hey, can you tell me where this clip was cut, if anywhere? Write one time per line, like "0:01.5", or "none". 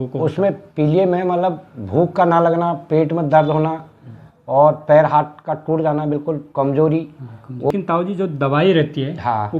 0:07.7